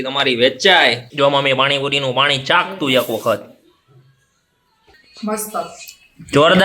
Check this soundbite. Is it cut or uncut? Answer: cut